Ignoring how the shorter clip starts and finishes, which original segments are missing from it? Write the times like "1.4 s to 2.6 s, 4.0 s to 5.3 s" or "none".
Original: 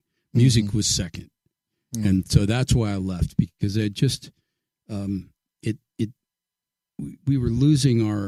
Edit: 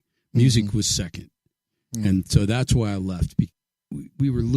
3.5 s to 6.6 s

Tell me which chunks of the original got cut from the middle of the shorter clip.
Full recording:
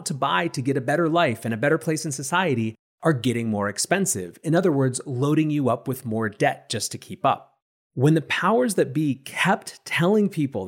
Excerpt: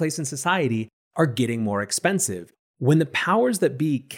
4.3 s to 7.6 s

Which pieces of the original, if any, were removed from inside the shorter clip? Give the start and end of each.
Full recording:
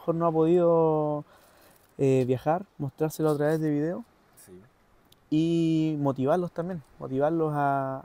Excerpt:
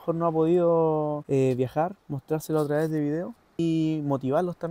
1.2 s to 1.9 s, 4.3 s to 5.5 s

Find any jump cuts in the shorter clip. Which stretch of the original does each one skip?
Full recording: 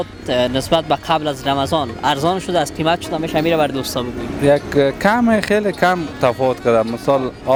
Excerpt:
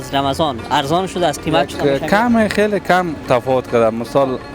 3.1 s to 4.7 s

